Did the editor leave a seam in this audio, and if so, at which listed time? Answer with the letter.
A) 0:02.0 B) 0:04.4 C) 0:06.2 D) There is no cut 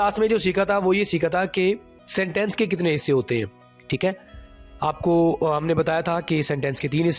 A